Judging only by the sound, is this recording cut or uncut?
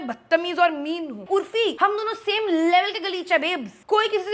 cut